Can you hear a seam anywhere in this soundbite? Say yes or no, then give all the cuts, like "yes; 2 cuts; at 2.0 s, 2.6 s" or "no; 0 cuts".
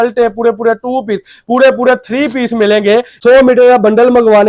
yes; 1 cut; at 3.1 s